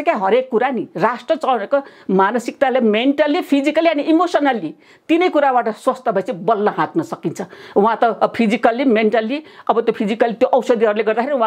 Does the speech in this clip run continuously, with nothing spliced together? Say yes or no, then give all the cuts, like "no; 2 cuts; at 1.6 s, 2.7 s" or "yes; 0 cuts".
yes; 0 cuts